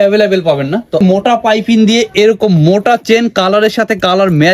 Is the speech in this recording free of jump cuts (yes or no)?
no